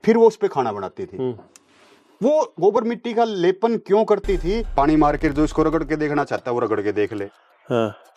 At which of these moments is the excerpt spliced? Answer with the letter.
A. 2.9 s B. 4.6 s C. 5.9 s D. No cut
B